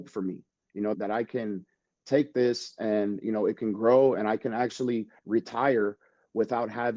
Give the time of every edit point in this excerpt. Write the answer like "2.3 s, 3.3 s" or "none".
0.9 s